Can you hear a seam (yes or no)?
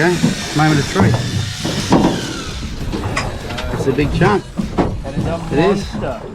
no